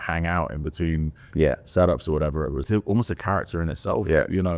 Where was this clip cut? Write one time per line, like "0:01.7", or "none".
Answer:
0:02.7